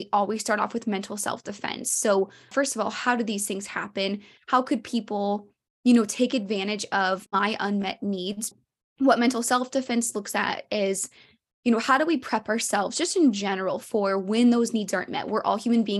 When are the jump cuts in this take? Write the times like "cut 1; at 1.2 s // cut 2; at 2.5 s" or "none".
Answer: cut 1; at 2.5 s // cut 2; at 7.2 s // cut 3; at 8.6 s